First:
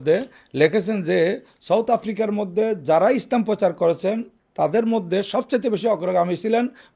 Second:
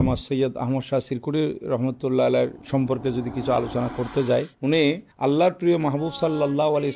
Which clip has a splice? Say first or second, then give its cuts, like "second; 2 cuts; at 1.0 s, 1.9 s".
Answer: second; 2 cuts; at 2.6 s, 4.9 s